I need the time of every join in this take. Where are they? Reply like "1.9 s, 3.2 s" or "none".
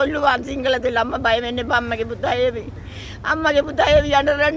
none